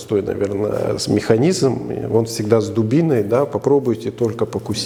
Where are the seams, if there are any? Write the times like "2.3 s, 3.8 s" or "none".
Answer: none